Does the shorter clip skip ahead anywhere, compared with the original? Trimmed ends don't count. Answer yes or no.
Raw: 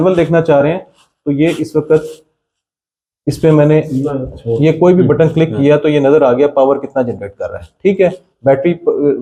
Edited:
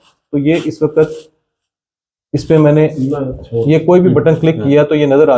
no